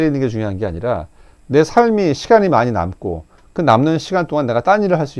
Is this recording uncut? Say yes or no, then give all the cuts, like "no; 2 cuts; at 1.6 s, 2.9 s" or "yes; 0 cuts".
yes; 0 cuts